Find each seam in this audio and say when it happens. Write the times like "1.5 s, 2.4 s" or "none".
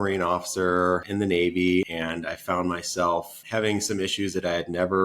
1.1 s, 1.9 s, 3.4 s